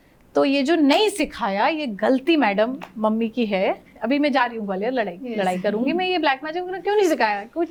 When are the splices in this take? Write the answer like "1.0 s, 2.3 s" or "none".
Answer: none